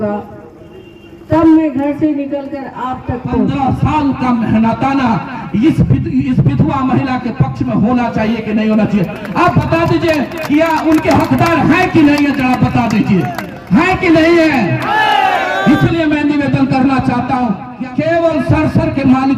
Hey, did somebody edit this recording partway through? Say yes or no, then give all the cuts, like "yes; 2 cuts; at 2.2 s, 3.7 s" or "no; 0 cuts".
yes; 2 cuts; at 3.2 s, 17.7 s